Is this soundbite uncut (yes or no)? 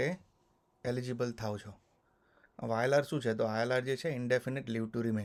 yes